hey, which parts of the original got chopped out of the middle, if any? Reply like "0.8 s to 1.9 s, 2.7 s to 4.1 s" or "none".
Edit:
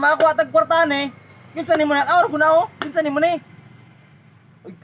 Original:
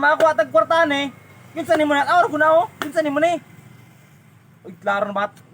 none